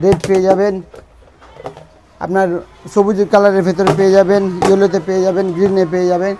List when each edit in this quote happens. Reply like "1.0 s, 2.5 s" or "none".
none